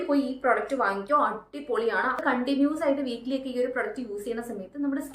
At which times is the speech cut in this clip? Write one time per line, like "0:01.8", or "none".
0:02.2